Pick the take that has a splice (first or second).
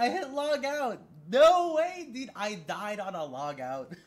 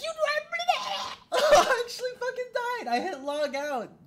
second